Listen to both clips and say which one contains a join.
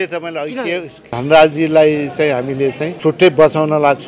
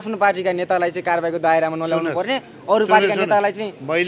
first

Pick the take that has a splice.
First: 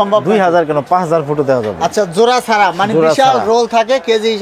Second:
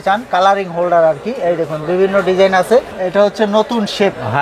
second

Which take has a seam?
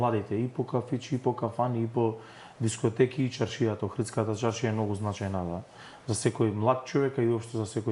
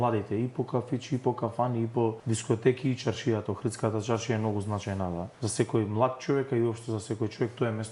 second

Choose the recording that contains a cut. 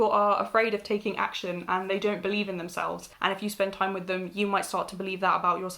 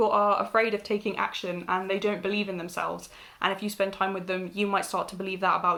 first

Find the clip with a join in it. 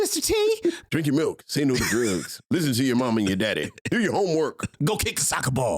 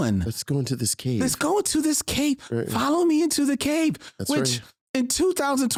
first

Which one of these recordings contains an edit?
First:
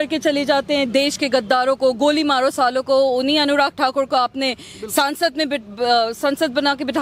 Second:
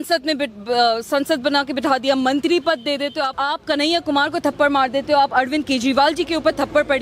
second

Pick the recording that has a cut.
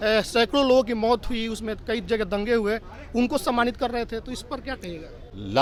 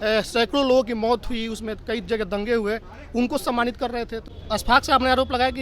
second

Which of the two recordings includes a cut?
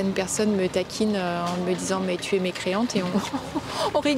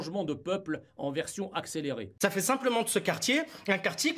second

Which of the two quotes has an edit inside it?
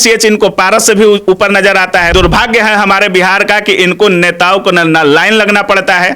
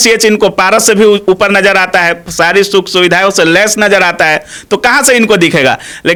first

